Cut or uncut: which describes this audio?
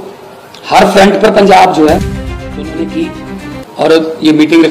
cut